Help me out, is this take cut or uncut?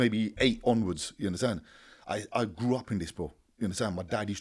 uncut